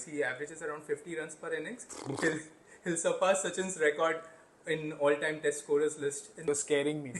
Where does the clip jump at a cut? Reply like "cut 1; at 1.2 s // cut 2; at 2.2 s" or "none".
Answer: cut 1; at 6.3 s

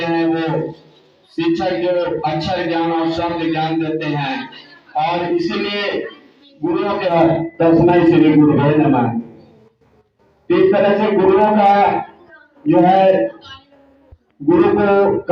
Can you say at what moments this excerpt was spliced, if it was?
cut 1; at 7.1 s

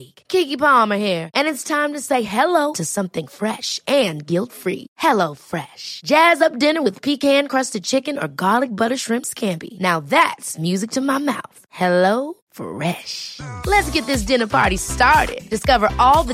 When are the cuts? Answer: none

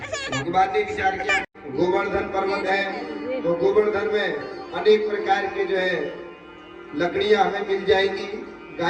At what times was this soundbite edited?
cut 1; at 1.6 s

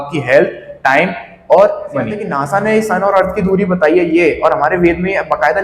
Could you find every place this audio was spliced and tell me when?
cut 1; at 2.3 s

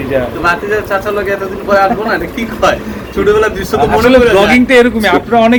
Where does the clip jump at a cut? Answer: none

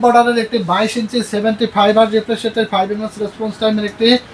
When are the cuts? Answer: none

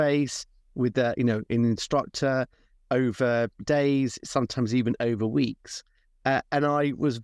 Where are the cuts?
cut 1; at 3.6 s

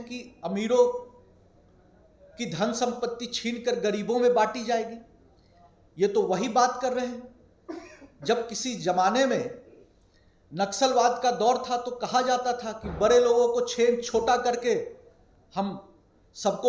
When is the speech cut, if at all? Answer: none

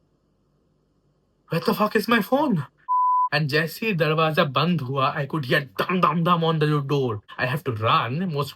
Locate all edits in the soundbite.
cut 1; at 3.2 s // cut 2; at 7.3 s

